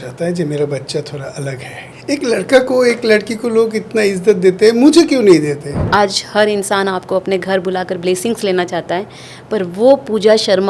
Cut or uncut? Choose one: cut